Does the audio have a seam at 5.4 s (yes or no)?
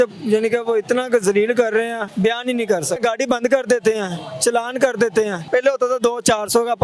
yes